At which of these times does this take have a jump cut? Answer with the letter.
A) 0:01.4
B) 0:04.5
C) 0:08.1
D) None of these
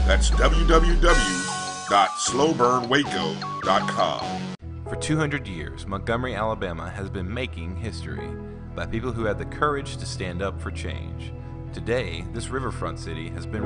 B